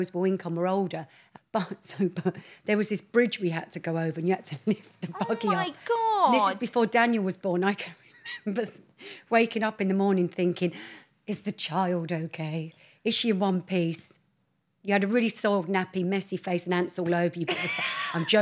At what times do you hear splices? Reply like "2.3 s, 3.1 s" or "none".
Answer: 1.2 s